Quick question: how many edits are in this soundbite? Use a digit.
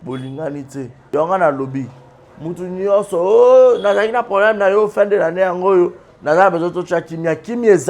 1